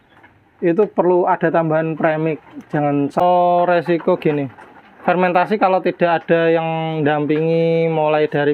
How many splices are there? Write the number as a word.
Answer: one